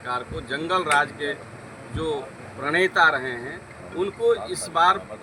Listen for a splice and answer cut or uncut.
uncut